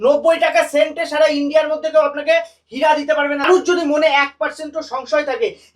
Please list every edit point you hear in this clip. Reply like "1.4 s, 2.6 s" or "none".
3.5 s